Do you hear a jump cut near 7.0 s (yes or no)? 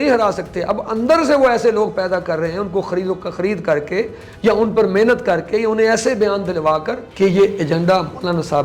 yes